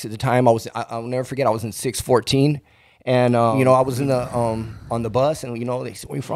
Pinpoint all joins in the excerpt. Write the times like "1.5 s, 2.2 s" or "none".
3.5 s